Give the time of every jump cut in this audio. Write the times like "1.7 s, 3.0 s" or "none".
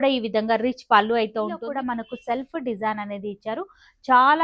1.6 s

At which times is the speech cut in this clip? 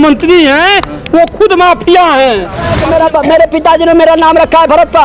2.7 s

